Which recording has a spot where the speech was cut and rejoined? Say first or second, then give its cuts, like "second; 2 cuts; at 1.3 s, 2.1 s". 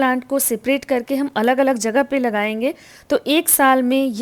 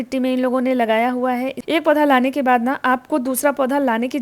second; 1 cut; at 1.6 s